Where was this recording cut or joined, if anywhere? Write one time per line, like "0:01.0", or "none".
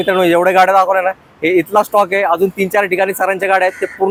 none